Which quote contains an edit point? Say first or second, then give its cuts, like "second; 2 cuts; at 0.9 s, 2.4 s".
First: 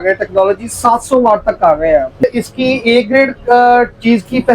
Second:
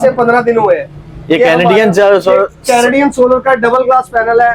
first; 1 cut; at 2.2 s